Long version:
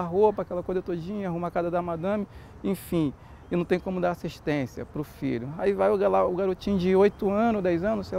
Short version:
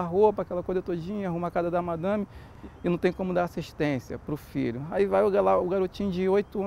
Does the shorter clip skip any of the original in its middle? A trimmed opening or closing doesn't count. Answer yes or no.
yes